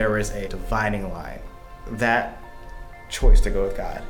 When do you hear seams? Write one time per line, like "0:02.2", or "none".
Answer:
0:01.6